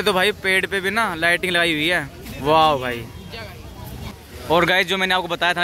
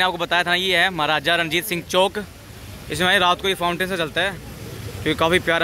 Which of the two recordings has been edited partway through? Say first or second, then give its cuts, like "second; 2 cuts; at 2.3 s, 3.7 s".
first; 2 cuts; at 2.2 s, 4.2 s